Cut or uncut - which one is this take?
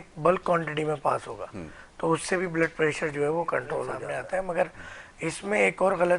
cut